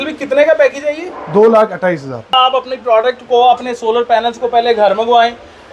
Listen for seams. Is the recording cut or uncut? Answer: cut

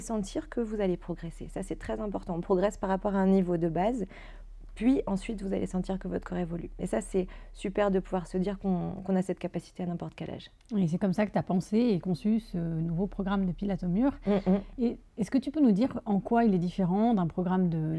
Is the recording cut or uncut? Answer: uncut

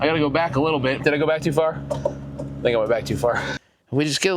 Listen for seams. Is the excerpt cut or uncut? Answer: cut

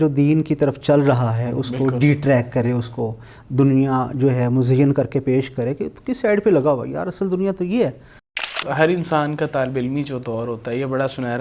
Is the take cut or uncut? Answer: cut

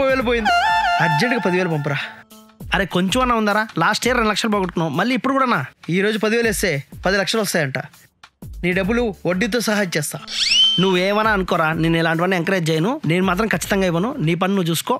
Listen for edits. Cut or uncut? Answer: uncut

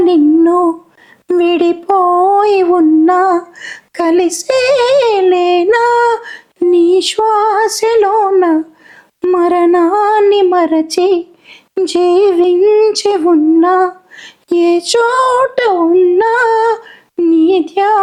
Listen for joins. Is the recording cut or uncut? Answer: uncut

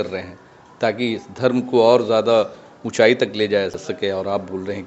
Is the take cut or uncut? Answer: cut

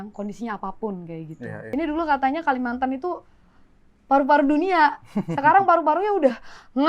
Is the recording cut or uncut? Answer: cut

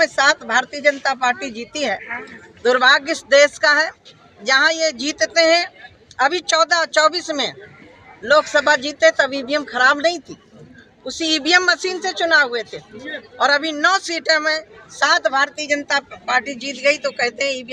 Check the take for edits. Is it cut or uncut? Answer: uncut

